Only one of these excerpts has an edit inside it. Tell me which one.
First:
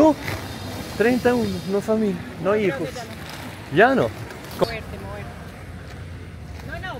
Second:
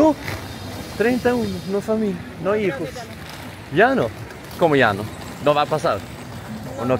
first; 1 cut; at 4.6 s

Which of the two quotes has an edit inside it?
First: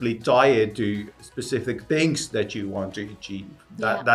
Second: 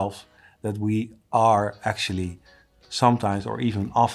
first; 1 cut; at 1.1 s

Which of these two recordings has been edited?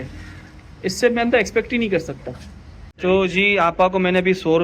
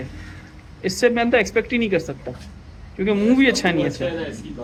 first; 1 cut; at 2.9 s

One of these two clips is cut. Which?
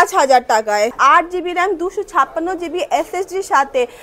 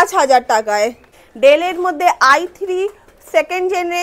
first; 1 cut; at 1.0 s

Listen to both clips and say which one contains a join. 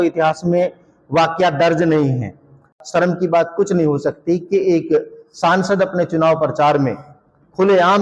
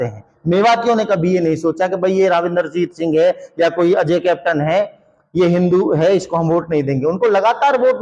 first; 1 cut; at 2.7 s

